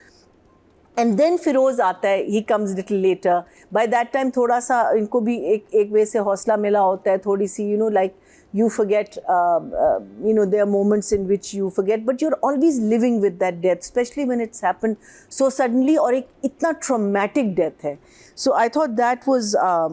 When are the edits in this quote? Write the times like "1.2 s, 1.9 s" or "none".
none